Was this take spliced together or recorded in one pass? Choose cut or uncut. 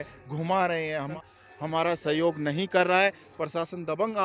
cut